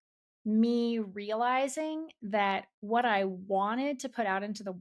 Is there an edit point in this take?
no; 0 cuts

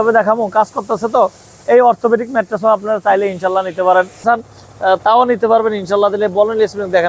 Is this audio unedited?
no; 1 cut; at 4.2 s

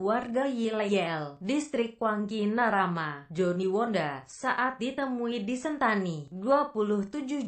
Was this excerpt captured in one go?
yes; 0 cuts

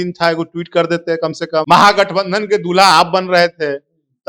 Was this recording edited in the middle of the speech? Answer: yes; 1 cut; at 1.6 s

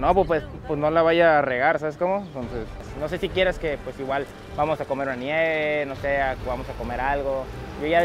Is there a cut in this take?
yes; 1 cut; at 2.8 s

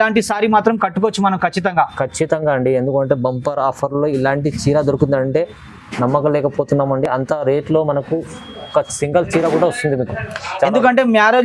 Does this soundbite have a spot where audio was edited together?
no; 0 cuts

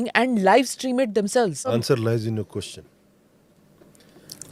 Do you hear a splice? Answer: yes; 1 cut; at 1.8 s

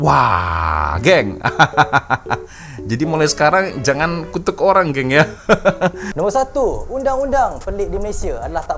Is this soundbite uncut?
no; 1 cut; at 6.0 s

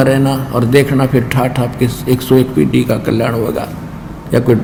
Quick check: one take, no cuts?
yes; 0 cuts

